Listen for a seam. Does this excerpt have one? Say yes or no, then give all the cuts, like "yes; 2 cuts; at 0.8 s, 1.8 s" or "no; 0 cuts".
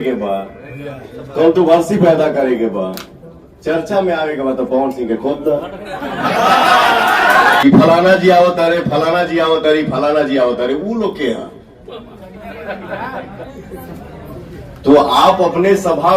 yes; 1 cut; at 7.6 s